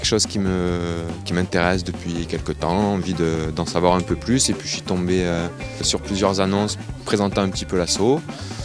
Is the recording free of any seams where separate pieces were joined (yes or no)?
no